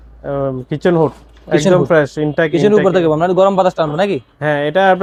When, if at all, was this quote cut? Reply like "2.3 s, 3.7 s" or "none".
none